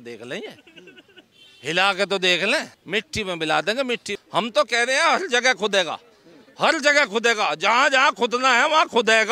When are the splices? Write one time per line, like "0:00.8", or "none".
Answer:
0:02.8
0:04.1